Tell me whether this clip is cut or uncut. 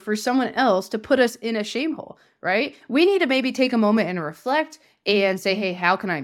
uncut